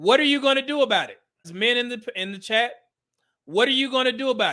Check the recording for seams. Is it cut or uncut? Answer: cut